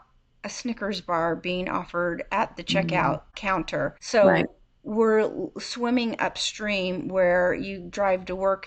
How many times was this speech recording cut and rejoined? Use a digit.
1